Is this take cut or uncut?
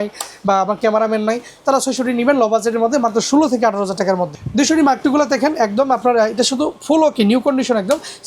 cut